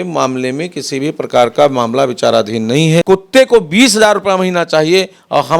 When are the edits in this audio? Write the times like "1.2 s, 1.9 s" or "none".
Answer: 3.0 s